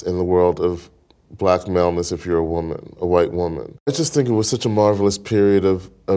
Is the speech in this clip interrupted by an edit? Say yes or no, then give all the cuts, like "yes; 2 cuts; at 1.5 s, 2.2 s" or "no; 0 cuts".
yes; 1 cut; at 3.9 s